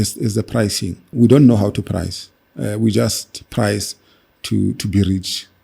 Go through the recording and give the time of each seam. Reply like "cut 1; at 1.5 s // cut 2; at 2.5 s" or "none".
cut 1; at 1.1 s